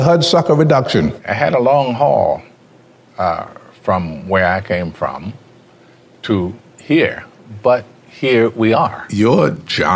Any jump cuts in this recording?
yes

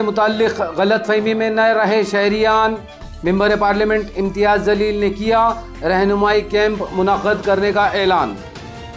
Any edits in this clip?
no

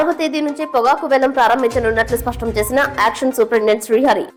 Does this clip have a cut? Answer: no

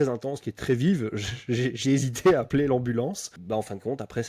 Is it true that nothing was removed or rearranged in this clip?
no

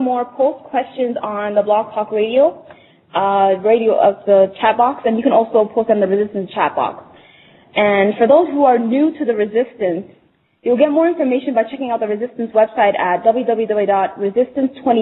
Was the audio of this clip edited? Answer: yes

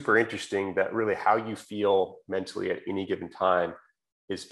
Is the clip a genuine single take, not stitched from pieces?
yes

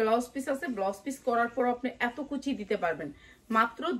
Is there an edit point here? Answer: no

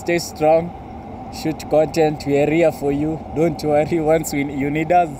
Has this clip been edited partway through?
no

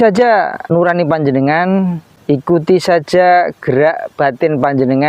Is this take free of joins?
no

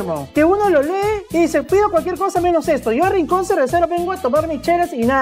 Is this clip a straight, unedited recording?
yes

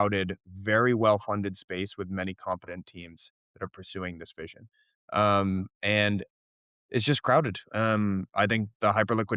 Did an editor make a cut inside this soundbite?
no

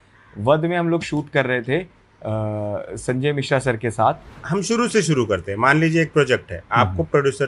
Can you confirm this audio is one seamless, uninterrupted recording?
no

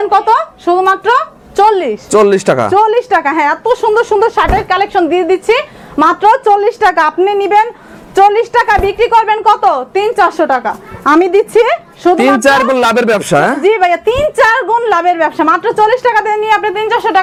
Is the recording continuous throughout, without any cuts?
yes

